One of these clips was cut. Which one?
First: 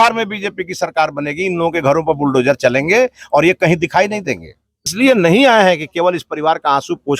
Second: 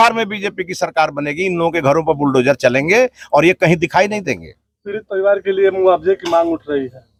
first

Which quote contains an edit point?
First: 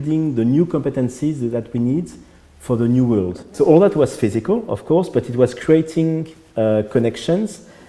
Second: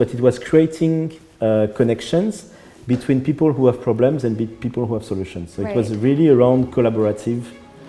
first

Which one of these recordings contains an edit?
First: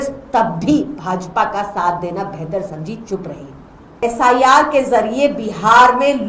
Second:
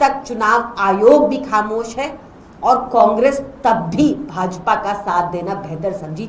first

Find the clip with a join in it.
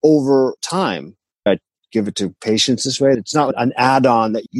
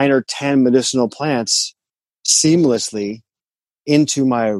first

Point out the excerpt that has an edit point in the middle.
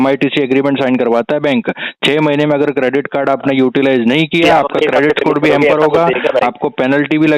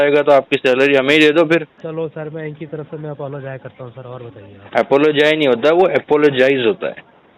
second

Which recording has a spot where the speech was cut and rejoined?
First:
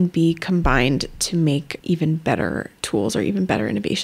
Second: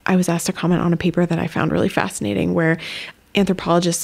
first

